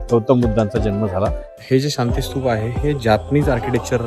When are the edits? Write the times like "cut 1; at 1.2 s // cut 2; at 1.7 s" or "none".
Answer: cut 1; at 1.5 s